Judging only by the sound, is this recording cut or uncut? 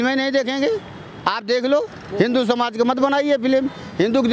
cut